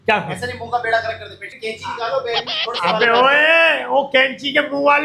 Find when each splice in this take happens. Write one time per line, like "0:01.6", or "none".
0:01.5